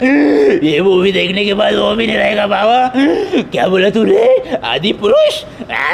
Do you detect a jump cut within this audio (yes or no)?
no